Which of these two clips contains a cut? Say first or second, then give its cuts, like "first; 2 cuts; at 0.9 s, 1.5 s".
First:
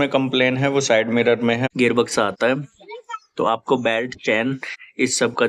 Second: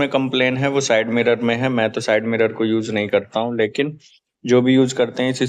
first; 1 cut; at 1.7 s